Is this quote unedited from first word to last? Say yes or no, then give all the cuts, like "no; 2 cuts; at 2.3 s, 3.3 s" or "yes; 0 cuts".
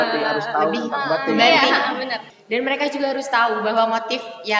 no; 1 cut; at 2.3 s